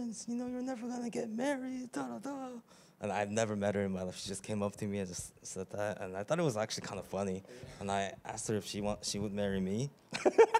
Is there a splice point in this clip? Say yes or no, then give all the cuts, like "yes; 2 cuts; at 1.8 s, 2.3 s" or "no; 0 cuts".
no; 0 cuts